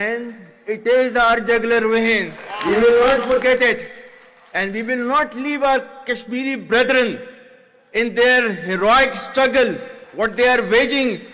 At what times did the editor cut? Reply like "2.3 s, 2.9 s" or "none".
none